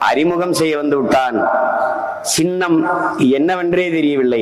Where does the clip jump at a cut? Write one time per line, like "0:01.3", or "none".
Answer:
none